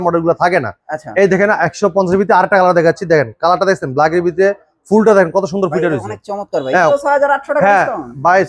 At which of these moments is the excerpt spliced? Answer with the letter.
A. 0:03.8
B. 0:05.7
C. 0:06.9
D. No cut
C